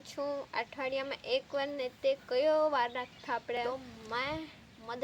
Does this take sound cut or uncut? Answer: cut